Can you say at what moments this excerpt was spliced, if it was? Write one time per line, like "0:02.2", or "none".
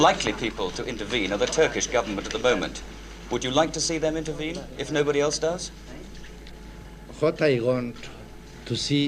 none

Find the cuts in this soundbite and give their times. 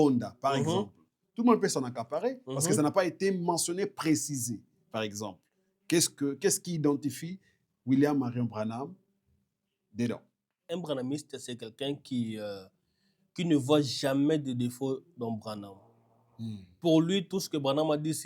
0:10.6

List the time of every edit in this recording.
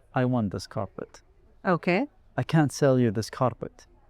none

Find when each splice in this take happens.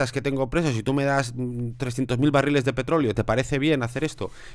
none

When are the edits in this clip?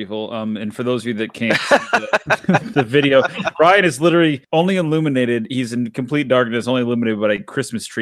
none

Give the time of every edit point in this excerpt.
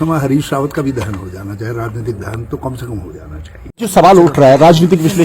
none

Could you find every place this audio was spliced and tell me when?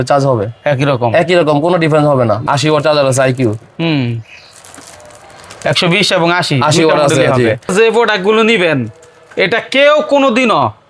0:02.4
0:07.7

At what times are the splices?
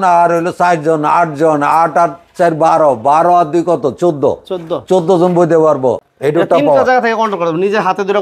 0:06.1

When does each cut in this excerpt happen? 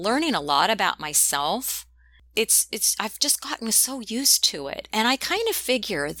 0:02.1

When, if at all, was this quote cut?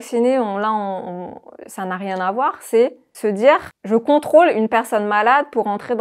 0:03.1
0:03.7

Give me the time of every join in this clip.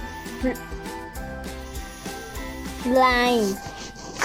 0:01.2
0:02.8

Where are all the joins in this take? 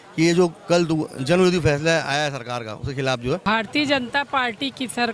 0:03.5

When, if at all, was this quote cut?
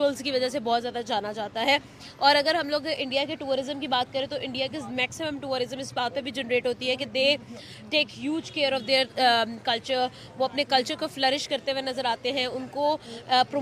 none

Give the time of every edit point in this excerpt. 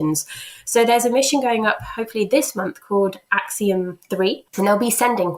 0:04.5

